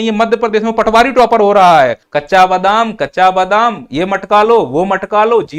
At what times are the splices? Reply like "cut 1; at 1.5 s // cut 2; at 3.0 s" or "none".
cut 1; at 2.1 s